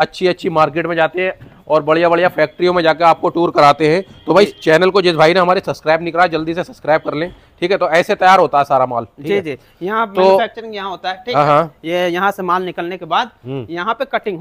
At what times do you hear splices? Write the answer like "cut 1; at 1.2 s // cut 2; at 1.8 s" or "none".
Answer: none